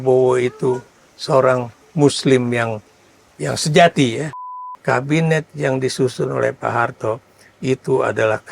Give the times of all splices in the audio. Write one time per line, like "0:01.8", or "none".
0:04.4

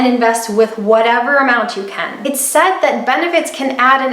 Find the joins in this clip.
0:02.1

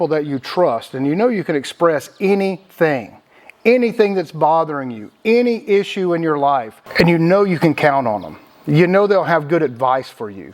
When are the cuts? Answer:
none

